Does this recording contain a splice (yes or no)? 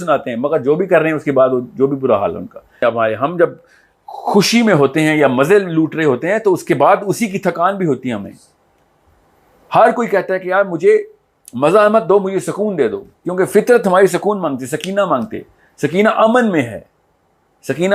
yes